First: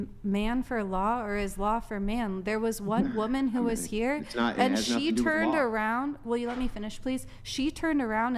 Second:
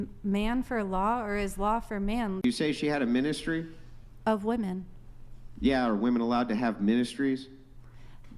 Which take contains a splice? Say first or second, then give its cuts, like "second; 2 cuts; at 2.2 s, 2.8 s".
second; 1 cut; at 2.4 s